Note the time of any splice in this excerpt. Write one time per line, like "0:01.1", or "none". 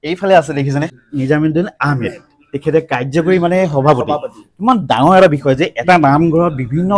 0:01.0